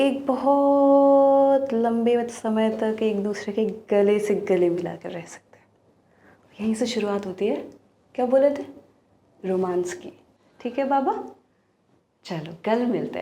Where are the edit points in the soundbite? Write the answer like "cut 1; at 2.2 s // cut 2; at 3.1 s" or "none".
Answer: cut 1; at 10.6 s

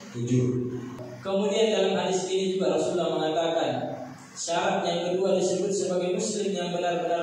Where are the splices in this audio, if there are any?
cut 1; at 1.1 s

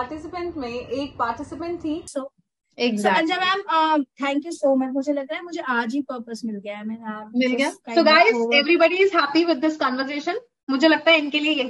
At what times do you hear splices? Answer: cut 1; at 2.1 s

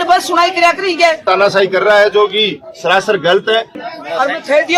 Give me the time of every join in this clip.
cut 1; at 1.2 s // cut 2; at 3.8 s

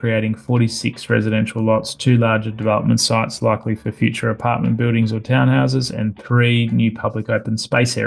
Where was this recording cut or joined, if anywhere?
none

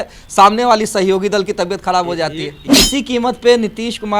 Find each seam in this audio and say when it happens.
cut 1; at 2.7 s

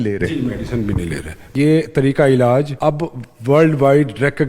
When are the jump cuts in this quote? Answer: cut 1; at 1.5 s // cut 2; at 2.7 s

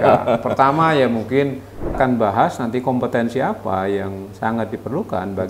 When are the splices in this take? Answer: cut 1; at 2.0 s

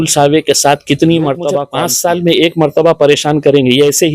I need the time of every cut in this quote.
cut 1; at 1.6 s

